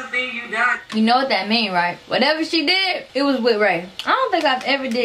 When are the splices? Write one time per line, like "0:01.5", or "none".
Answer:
0:00.8
0:03.9